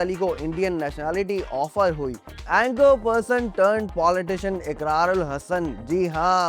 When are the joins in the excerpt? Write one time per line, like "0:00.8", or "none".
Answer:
0:02.2

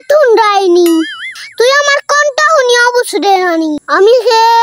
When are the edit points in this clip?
0:01.4

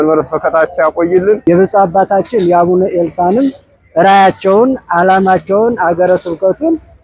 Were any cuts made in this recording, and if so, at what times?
0:01.4

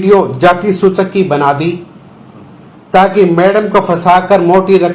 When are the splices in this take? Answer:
none

